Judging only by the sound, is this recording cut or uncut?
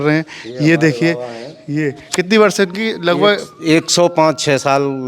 uncut